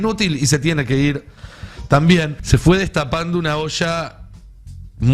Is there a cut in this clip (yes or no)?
yes